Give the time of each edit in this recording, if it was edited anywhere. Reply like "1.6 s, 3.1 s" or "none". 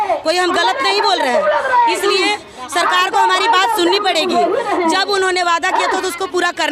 none